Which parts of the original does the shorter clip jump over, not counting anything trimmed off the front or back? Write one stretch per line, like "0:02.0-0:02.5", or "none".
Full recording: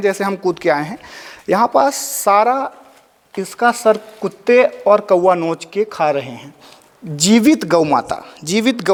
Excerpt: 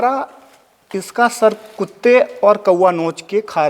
none